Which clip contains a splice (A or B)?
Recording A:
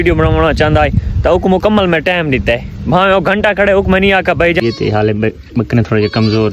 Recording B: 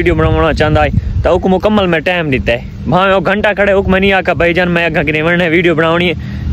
A